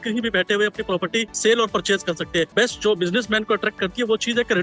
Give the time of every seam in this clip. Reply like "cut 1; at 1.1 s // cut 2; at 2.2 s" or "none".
cut 1; at 1.3 s // cut 2; at 2.5 s